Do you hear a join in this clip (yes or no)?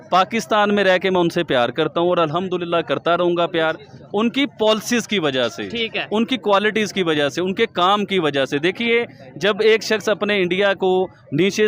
no